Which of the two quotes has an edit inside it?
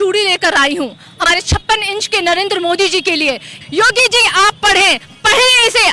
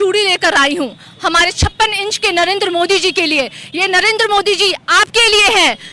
first; 2 cuts; at 1.2 s, 3.6 s

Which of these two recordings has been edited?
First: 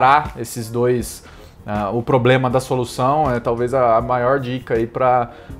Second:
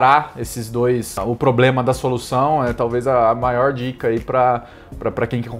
second; 1 cut; at 1.2 s

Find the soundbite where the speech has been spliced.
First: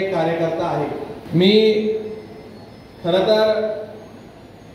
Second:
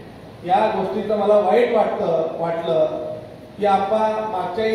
first; 1 cut; at 1.1 s

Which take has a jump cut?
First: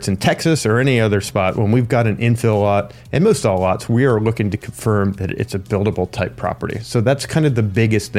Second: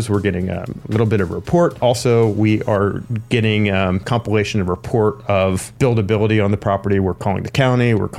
second; 3 cuts; at 1.8 s, 4.1 s, 5.7 s

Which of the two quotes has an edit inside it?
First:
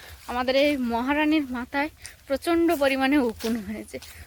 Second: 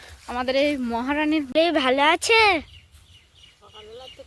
second; 1 cut; at 1.5 s

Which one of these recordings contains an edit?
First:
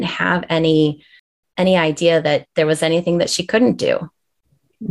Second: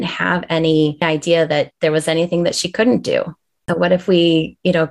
second; 2 cuts; at 1.0 s, 3.7 s

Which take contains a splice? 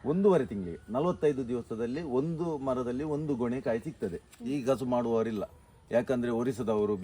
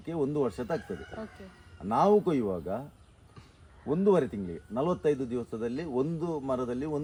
first; 1 cut; at 4.3 s

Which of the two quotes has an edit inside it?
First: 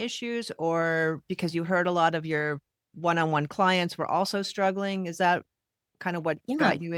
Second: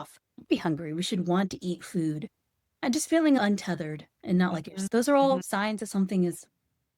second; 1 cut; at 2.8 s

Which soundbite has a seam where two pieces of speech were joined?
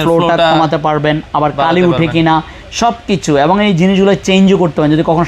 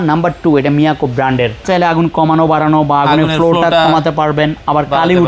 second; 1 cut; at 1.6 s

